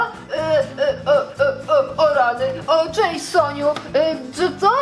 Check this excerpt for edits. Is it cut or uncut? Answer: uncut